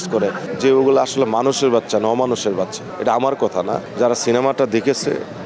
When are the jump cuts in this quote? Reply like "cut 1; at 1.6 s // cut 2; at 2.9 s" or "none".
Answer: none